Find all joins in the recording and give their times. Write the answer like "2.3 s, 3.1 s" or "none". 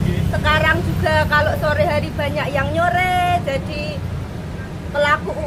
none